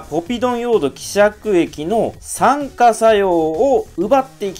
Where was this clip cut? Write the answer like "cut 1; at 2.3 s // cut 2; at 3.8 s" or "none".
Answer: none